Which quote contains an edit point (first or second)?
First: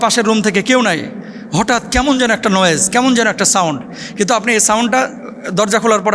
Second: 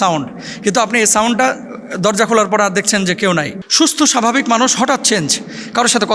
second